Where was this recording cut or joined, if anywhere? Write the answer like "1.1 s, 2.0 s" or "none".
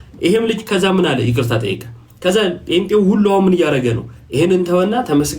none